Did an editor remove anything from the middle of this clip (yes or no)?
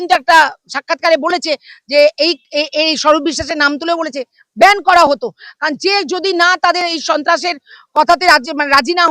no